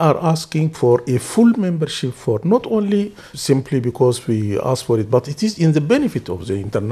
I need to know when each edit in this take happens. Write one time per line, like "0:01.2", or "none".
0:03.3